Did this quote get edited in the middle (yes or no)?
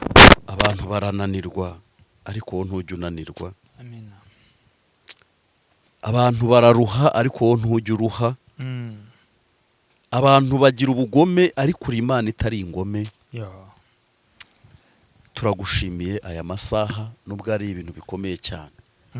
no